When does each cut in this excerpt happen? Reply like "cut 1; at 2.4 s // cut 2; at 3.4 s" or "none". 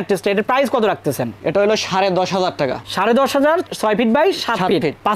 none